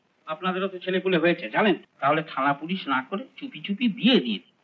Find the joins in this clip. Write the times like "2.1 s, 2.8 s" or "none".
1.9 s